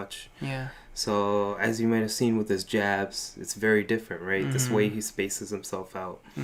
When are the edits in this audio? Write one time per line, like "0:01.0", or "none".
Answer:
none